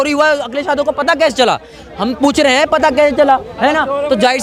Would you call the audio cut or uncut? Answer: uncut